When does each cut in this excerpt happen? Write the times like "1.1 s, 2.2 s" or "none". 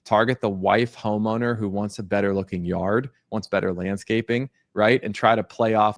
none